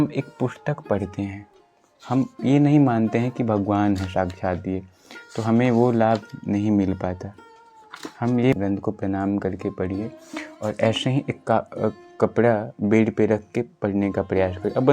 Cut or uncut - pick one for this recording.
cut